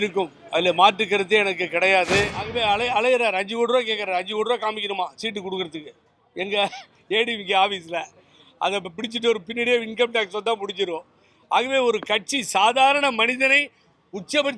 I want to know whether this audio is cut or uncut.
cut